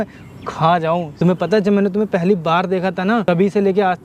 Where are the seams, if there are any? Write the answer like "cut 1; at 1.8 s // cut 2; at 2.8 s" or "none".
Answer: cut 1; at 1.1 s // cut 2; at 3.2 s